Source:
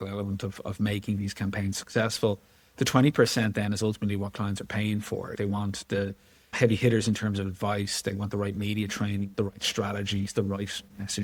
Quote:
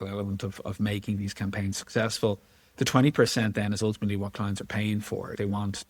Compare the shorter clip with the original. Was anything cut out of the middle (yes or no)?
no